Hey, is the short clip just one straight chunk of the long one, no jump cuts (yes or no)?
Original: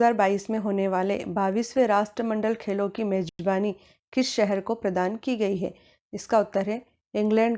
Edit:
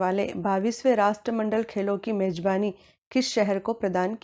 no